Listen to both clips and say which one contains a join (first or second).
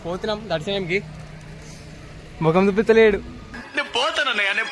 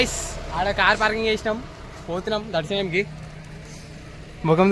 first